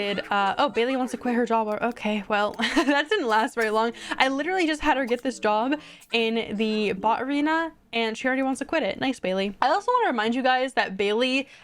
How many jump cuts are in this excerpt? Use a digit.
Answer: 1